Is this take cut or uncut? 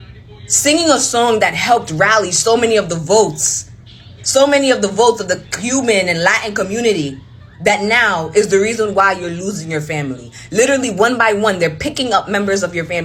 uncut